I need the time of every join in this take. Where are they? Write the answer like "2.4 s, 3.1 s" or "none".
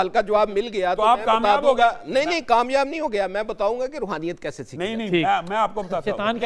none